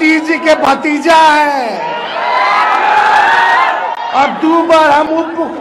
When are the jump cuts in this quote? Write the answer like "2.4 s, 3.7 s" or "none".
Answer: none